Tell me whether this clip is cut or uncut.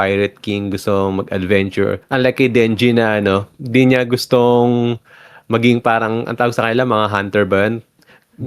cut